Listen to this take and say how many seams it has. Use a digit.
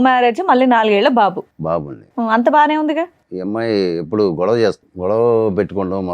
2